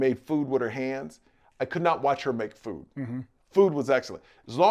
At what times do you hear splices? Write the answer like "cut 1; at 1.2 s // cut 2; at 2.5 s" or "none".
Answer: cut 1; at 3.3 s